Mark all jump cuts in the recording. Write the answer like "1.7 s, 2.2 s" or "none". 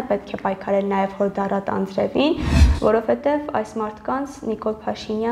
2.5 s